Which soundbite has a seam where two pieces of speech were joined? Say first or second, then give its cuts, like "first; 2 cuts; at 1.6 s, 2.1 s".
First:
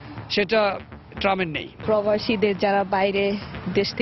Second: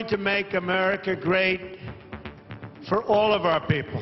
first; 1 cut; at 1.8 s